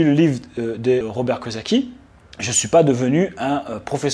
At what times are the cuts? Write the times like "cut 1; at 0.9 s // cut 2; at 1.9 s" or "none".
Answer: cut 1; at 1.0 s